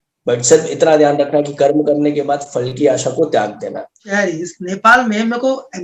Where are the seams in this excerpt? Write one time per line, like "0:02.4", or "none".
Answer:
0:04.0